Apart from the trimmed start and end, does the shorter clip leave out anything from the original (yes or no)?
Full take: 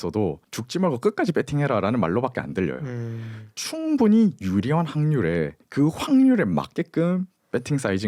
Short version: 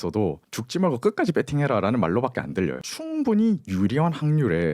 yes